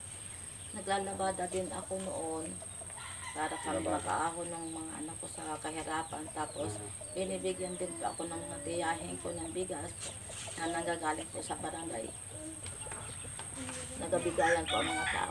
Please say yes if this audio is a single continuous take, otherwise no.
no